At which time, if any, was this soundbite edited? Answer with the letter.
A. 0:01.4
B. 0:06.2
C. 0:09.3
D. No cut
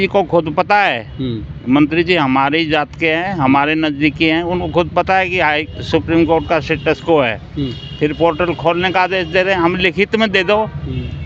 D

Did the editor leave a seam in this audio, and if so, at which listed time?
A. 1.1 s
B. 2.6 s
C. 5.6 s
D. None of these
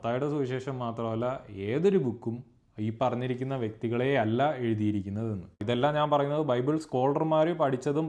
C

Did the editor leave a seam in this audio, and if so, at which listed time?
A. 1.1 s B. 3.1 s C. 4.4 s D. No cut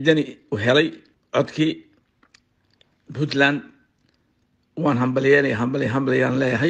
A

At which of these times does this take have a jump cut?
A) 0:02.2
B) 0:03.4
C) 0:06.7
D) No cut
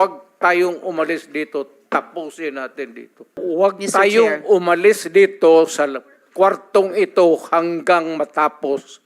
B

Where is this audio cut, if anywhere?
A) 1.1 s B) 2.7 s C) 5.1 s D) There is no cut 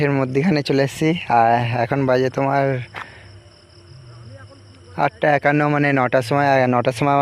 D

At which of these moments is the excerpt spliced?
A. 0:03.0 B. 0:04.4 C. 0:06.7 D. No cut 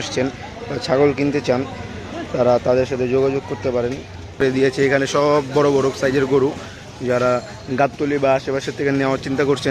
B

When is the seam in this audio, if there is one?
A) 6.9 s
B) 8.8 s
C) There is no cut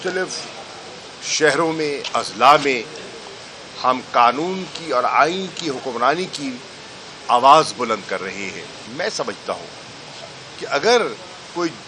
B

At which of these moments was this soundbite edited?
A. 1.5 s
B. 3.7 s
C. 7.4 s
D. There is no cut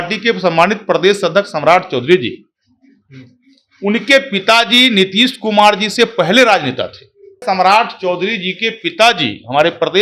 C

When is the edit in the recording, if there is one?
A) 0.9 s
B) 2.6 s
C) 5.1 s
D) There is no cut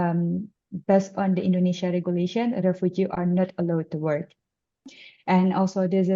C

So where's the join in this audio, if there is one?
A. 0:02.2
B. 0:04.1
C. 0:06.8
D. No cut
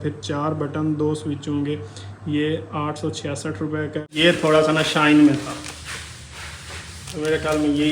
B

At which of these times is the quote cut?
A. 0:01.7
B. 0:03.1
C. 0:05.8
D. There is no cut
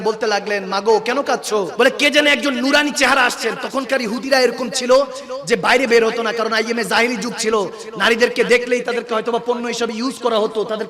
A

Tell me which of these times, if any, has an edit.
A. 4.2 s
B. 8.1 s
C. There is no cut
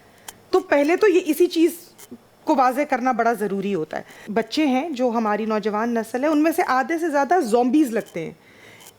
A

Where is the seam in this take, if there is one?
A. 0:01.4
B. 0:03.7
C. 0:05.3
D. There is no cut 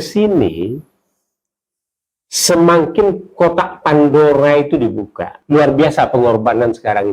C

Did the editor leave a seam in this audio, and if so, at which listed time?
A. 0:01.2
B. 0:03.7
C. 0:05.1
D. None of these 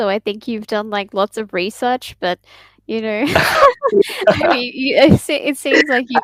D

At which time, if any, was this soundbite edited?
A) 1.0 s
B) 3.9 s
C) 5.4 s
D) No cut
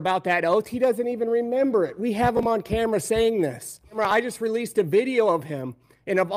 B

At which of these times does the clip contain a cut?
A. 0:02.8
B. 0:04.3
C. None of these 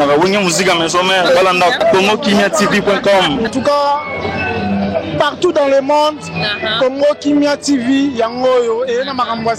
C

